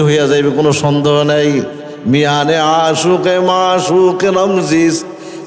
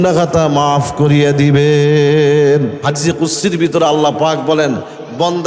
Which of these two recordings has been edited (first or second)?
second